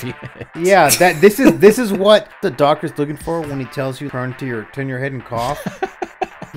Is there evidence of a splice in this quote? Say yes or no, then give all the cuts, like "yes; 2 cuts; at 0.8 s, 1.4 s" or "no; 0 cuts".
yes; 3 cuts; at 2.5 s, 4.1 s, 5.6 s